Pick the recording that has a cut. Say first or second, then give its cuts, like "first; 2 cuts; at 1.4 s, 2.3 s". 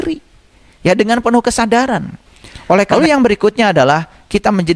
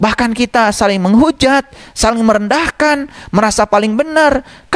first; 1 cut; at 2.9 s